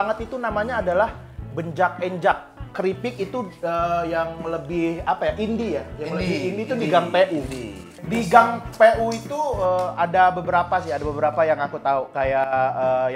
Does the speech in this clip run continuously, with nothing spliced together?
no; 2 cuts; at 2.7 s, 7.9 s

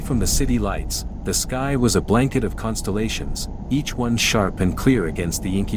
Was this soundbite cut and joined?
no; 0 cuts

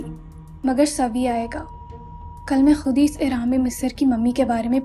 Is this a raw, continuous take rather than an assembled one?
yes; 0 cuts

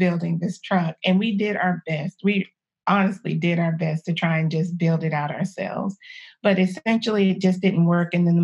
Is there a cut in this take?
no; 0 cuts

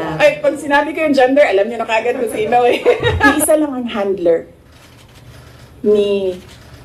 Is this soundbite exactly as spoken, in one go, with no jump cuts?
no; 1 cut; at 3.2 s

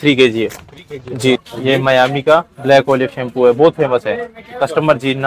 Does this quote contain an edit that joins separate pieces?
yes; 1 cut; at 1.4 s

